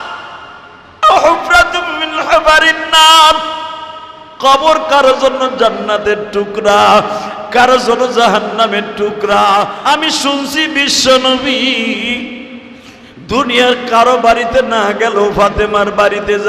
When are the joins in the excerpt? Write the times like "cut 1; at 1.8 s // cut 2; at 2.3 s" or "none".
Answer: cut 1; at 9.8 s

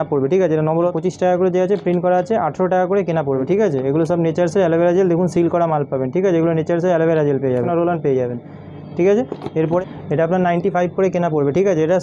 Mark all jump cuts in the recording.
cut 1; at 0.9 s // cut 2; at 3.4 s // cut 3; at 7.7 s // cut 4; at 9.8 s

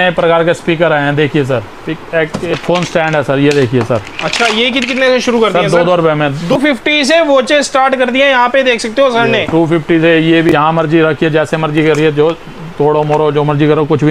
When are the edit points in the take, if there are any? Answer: cut 1; at 2.5 s // cut 2; at 6.5 s // cut 3; at 10.5 s

